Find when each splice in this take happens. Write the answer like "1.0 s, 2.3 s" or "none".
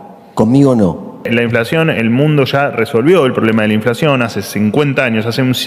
1.2 s